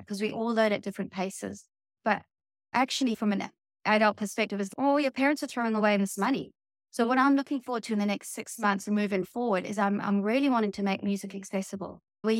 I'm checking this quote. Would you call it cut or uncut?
uncut